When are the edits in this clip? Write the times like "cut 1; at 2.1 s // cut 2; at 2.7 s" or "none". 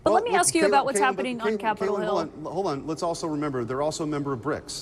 none